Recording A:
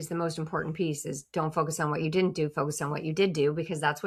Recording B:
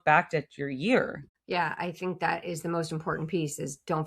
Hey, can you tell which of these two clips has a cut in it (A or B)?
B